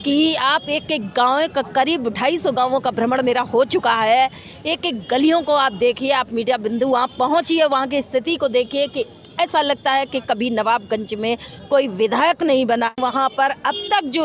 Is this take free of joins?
no; 1 cut; at 12.9 s

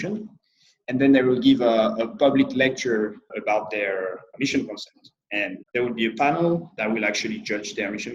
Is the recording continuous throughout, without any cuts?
no; 4 cuts; at 3.3 s, 4.3 s, 5.6 s, 6.7 s

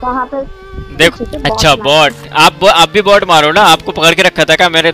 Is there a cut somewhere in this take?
yes; 1 cut; at 1.1 s

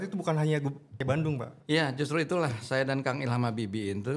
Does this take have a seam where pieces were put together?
yes; 1 cut; at 1.0 s

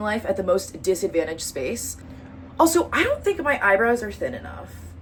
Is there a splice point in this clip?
no; 0 cuts

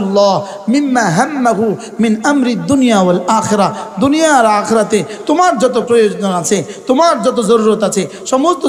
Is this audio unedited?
yes; 0 cuts

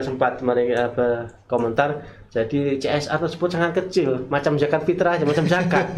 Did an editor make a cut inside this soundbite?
no; 0 cuts

